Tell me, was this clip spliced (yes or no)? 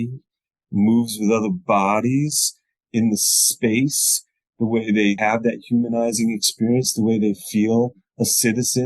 yes